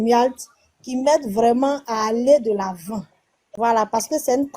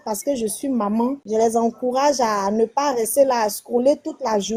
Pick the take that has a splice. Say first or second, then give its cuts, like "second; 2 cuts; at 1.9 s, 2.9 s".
first; 1 cut; at 3.4 s